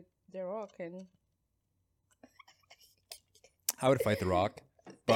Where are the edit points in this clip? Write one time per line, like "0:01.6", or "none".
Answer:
none